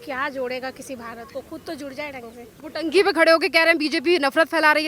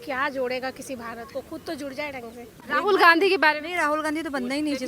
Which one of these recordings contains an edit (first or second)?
second